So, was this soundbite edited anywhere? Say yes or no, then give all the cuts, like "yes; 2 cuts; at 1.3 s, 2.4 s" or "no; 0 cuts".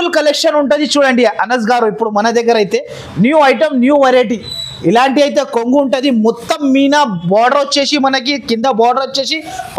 no; 0 cuts